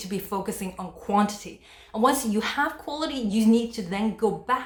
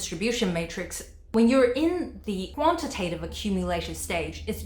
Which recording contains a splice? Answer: second; 1 cut; at 2.5 s

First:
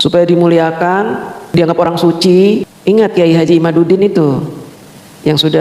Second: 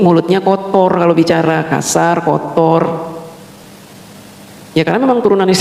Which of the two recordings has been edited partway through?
first; 1 cut; at 2.7 s

